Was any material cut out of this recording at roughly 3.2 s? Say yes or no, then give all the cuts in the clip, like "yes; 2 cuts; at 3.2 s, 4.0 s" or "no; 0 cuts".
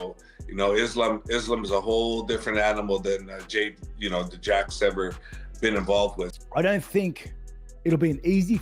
no; 1 cut; at 6.3 s